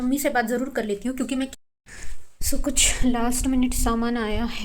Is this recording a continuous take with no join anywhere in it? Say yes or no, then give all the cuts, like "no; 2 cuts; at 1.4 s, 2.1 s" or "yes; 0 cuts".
no; 1 cut; at 1.5 s